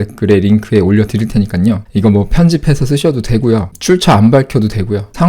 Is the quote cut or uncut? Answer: uncut